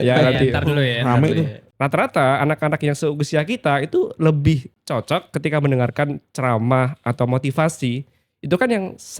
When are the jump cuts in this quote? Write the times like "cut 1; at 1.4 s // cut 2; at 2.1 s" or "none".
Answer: cut 1; at 1.7 s